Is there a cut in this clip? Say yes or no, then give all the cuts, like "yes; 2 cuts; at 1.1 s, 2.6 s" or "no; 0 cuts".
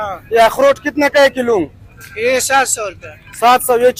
no; 0 cuts